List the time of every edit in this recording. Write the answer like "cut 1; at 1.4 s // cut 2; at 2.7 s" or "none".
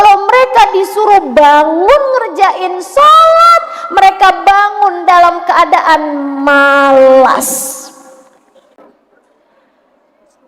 cut 1; at 8.7 s